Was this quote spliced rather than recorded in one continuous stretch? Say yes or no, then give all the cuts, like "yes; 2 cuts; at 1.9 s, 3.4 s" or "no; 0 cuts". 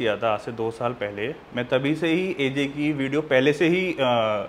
no; 0 cuts